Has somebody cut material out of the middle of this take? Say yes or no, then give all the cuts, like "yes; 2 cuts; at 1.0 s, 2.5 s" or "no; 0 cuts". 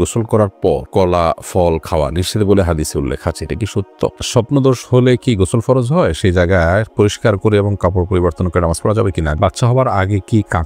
yes; 2 cuts; at 4.2 s, 9.4 s